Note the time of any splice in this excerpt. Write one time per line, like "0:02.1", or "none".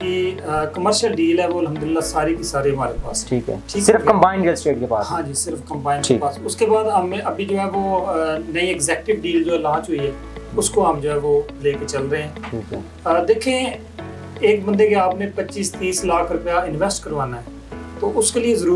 none